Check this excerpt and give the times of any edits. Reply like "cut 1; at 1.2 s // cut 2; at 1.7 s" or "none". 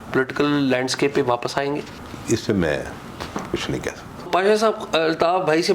cut 1; at 4.3 s